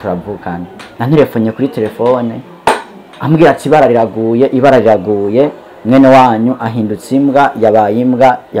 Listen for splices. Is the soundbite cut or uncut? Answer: cut